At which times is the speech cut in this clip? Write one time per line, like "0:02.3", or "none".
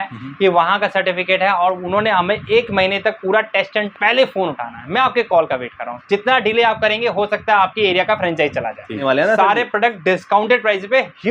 0:03.9
0:09.0

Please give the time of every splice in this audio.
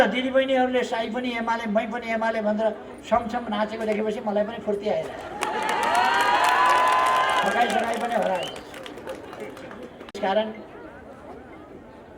none

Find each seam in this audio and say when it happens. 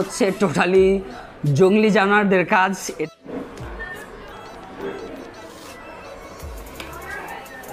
0:03.0

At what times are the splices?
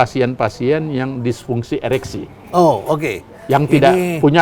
none

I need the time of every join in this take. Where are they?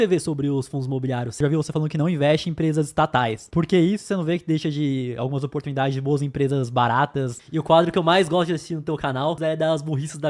0:01.4
0:03.4
0:07.4
0:09.4

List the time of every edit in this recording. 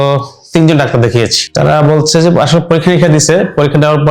0:01.4

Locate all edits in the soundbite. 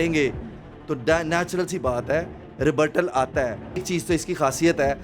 0:03.8

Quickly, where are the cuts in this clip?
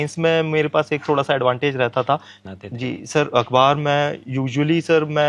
0:02.3

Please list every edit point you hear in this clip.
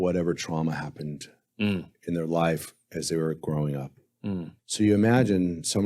0:04.5

